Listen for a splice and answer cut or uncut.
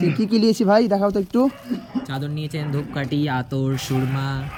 uncut